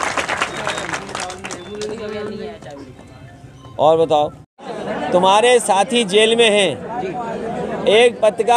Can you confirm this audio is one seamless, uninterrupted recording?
no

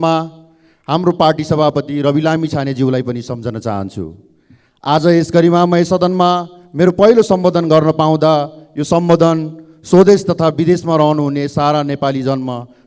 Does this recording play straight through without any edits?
yes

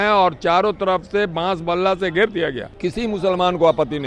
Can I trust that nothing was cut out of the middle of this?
no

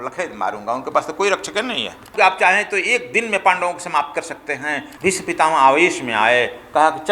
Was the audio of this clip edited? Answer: yes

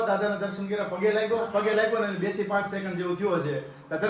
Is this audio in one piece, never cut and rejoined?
yes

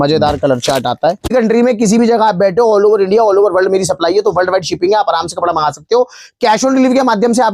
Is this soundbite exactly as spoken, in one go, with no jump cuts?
no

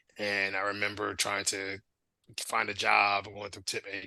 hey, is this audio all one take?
no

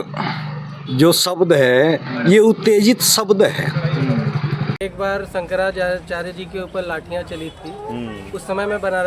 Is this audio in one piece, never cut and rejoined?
no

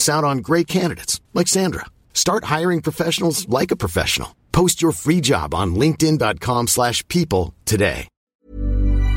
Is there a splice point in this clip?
yes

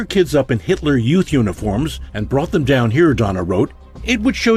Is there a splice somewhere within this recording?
no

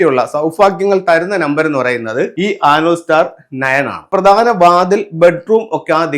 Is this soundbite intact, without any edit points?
no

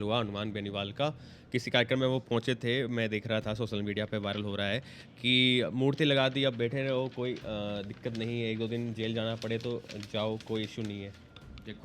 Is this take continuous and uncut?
yes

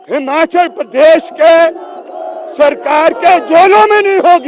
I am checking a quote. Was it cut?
no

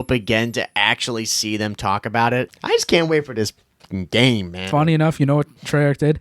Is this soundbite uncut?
no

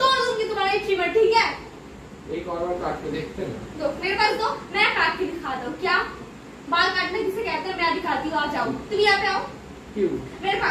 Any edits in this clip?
no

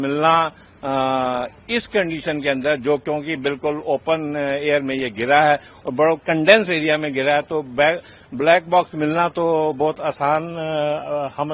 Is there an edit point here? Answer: no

